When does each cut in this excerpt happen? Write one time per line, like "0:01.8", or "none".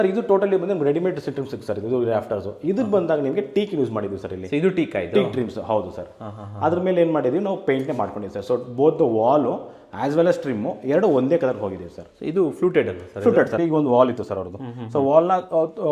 0:13.6